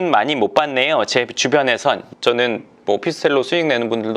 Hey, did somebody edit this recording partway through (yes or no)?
yes